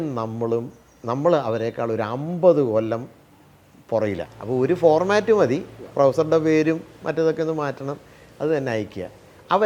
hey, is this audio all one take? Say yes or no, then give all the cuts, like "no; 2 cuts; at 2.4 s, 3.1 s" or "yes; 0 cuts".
no; 1 cut; at 4.3 s